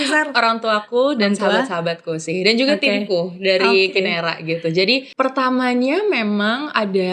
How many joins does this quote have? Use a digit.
1